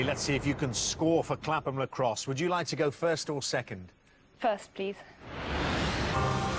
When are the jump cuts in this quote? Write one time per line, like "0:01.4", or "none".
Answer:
none